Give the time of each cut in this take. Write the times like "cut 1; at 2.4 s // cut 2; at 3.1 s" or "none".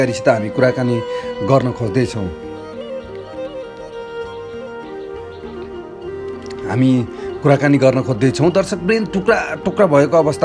cut 1; at 2.9 s // cut 2; at 4.0 s // cut 3; at 6.5 s

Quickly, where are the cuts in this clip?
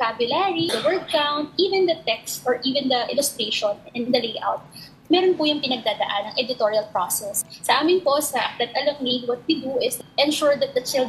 cut 1; at 0.7 s // cut 2; at 7.4 s // cut 3; at 10.0 s

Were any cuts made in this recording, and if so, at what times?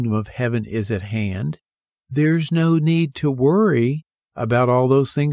none

